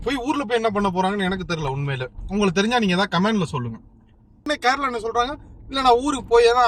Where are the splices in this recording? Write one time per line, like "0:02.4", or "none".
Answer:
0:04.4